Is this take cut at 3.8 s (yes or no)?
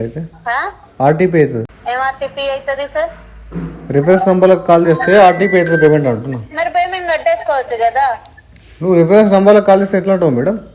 no